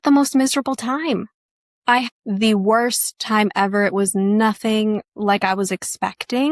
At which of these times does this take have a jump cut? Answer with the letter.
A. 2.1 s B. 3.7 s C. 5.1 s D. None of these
A